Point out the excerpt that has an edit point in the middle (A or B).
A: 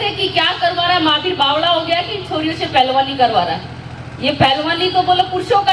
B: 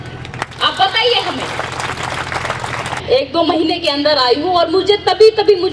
B